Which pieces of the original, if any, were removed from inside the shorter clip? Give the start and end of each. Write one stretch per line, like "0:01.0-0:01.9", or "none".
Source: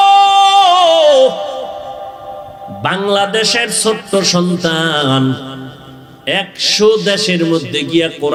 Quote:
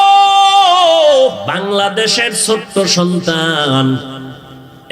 0:01.4-0:02.8